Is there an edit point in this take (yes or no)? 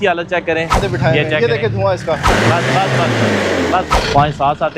yes